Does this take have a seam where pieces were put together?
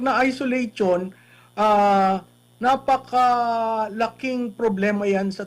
no; 0 cuts

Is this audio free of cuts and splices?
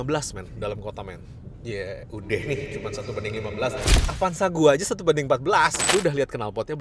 no; 1 cut; at 5.8 s

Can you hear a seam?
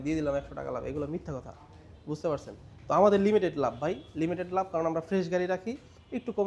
no; 0 cuts

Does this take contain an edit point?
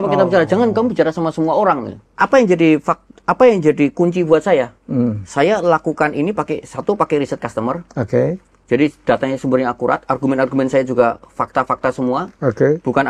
yes; 1 cut; at 2.0 s

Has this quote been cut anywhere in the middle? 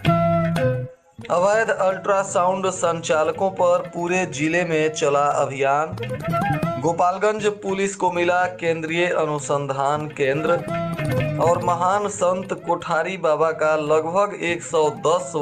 yes; 1 cut; at 0.9 s

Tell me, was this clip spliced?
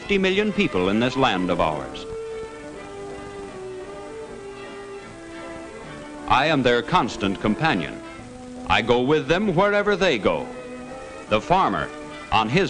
no; 0 cuts

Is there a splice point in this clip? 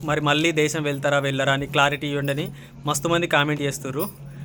no; 0 cuts

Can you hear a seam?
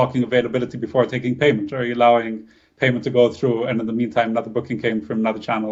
no; 0 cuts

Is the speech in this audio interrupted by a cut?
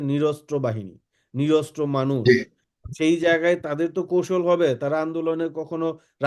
no; 0 cuts

